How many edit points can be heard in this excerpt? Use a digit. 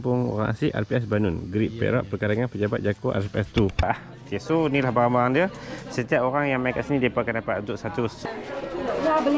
2